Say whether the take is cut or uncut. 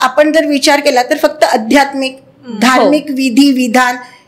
uncut